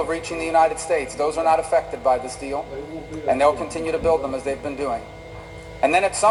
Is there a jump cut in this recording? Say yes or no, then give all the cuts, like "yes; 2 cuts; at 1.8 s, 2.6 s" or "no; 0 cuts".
no; 0 cuts